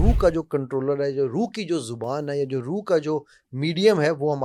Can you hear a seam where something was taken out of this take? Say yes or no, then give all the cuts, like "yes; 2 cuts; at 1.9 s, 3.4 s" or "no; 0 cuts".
no; 0 cuts